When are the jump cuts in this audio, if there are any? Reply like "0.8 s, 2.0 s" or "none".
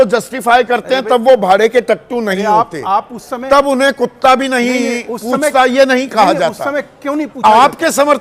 none